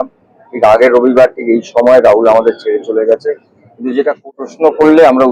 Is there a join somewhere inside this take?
yes; 1 cut; at 4.3 s

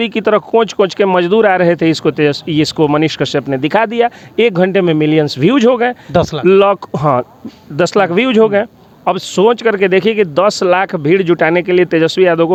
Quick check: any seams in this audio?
no; 0 cuts

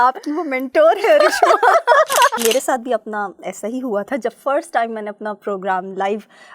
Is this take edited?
yes; 1 cut; at 2.4 s

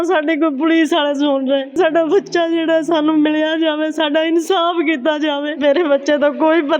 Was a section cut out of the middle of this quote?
yes; 2 cuts; at 1.7 s, 5.6 s

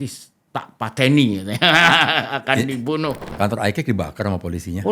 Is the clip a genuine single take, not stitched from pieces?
no; 1 cut; at 3.3 s

